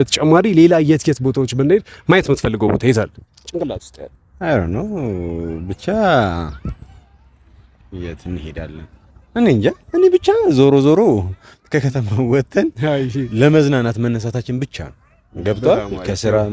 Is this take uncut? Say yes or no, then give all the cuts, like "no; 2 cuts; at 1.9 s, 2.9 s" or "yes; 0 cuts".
yes; 0 cuts